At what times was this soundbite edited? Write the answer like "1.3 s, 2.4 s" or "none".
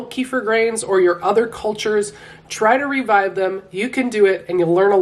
none